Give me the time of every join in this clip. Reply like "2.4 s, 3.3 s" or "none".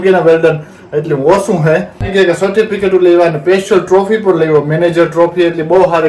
2.1 s